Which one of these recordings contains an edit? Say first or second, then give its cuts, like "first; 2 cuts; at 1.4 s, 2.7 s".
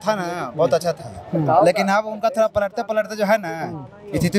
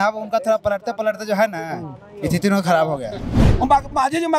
second; 1 cut; at 3.4 s